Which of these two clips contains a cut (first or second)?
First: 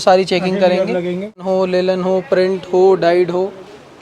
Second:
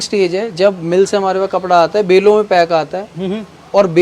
first